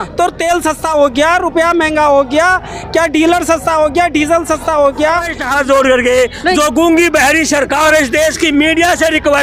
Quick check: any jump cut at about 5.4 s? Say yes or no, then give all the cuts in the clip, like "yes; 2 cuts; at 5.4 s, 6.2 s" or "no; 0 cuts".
yes; 1 cut; at 5.4 s